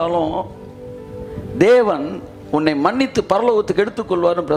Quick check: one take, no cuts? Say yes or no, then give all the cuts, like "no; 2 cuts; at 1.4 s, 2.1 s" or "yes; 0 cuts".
yes; 0 cuts